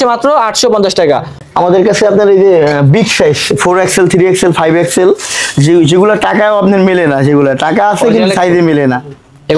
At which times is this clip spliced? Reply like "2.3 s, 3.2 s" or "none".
1.4 s